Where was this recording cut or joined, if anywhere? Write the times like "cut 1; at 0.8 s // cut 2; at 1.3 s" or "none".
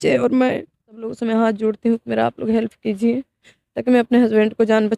cut 1; at 1.1 s